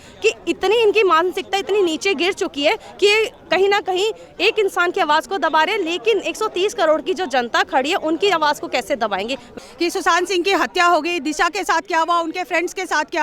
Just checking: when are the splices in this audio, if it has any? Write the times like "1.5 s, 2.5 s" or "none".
9.5 s